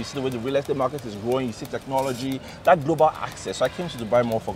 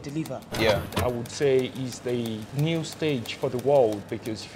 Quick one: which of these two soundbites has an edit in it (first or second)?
second